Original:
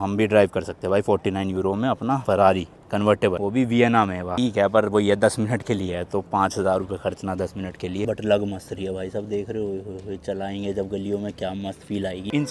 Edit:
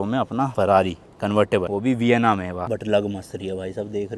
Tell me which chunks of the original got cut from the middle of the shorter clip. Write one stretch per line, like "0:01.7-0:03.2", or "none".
0:04.3-0:08.0